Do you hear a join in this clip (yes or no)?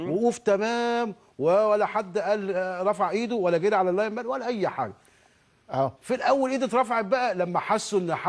yes